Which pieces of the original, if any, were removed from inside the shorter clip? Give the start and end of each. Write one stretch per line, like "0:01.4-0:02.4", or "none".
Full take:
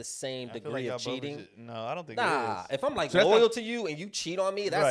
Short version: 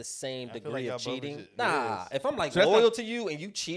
0:01.5-0:02.1